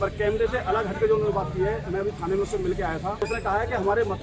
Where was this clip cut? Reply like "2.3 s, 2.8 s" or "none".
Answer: 3.2 s